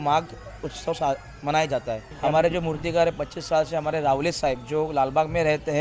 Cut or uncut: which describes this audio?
cut